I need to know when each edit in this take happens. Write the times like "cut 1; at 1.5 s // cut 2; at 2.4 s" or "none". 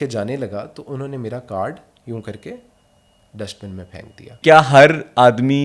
cut 1; at 4.4 s